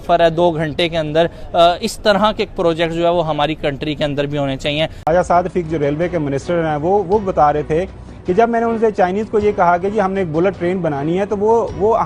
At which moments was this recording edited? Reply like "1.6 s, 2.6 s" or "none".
5.1 s